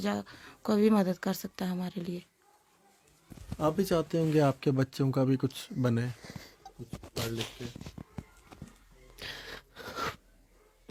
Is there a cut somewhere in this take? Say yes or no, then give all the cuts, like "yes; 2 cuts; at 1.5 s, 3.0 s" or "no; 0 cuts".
no; 0 cuts